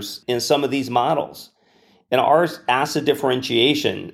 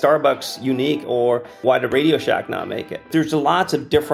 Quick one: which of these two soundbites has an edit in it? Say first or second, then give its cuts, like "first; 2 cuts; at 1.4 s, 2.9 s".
second; 2 cuts; at 1.4 s, 3.1 s